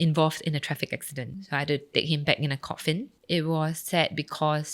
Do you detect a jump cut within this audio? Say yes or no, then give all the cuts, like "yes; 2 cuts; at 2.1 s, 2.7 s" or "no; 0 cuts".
yes; 3 cuts; at 1.3 s, 3.1 s, 3.8 s